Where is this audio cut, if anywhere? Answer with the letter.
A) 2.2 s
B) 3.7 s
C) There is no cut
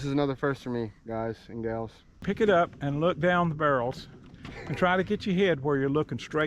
A